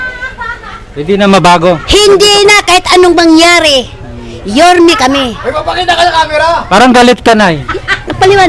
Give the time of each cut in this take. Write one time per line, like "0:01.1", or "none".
none